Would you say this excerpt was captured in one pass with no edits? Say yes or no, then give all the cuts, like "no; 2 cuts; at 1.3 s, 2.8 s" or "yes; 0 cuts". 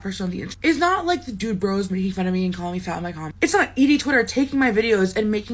no; 1 cut; at 3.7 s